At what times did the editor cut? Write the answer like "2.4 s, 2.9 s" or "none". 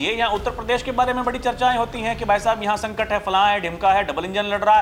none